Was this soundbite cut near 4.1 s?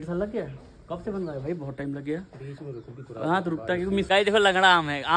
yes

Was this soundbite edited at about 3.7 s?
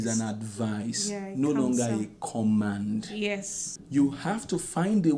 yes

